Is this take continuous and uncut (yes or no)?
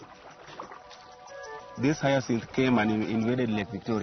no